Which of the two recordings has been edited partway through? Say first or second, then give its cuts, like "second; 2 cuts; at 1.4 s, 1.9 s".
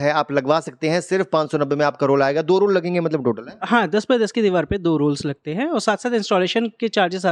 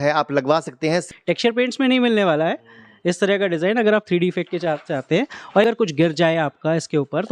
second; 2 cuts; at 1.0 s, 5.6 s